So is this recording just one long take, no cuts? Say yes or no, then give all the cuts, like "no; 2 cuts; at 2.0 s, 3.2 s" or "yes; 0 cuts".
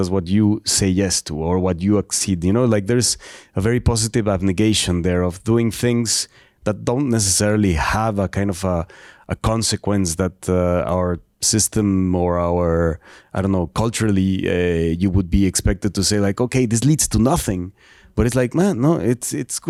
yes; 0 cuts